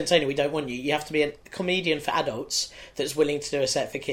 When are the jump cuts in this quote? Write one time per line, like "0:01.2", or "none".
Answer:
0:01.4